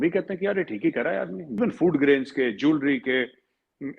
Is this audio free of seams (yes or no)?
no